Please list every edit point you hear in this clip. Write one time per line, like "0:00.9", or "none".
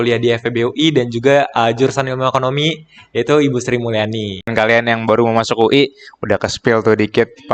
0:04.1